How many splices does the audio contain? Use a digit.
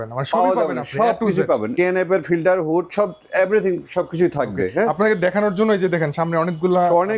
1